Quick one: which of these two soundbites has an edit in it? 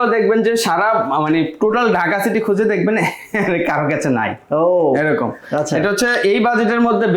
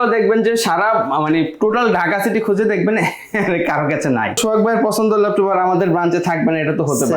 second; 1 cut; at 4.4 s

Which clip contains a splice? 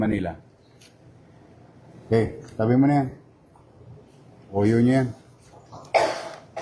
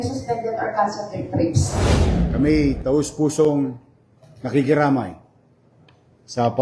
second; 1 cut; at 2.2 s

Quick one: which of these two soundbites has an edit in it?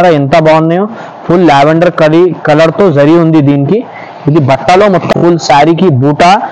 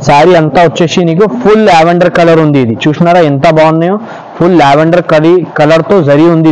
first; 1 cut; at 5.1 s

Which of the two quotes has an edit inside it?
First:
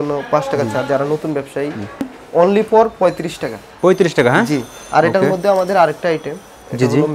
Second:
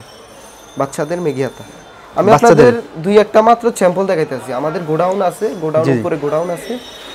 first; 1 cut; at 2.1 s

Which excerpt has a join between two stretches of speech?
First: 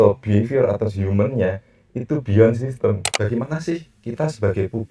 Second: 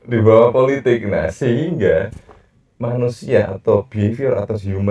first; 1 cut; at 3.1 s

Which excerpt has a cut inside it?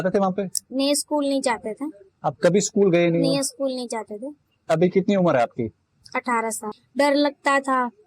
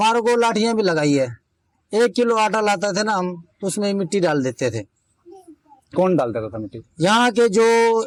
first; 1 cut; at 6.8 s

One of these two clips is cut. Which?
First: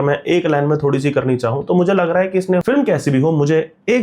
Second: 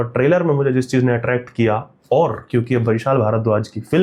first; 1 cut; at 2.6 s

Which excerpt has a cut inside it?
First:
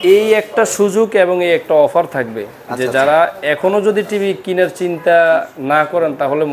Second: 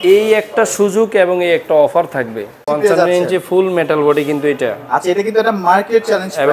second; 1 cut; at 2.6 s

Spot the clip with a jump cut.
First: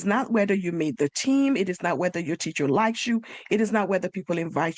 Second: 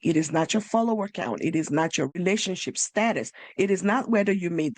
second; 1 cut; at 2.2 s

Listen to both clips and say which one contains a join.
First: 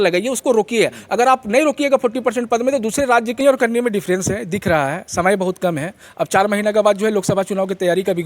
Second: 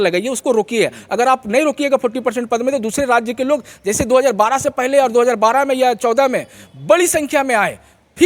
first; 1 cut; at 3.4 s

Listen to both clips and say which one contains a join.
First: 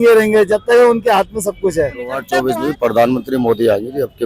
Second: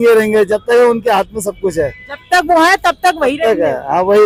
first; 1 cut; at 2.2 s

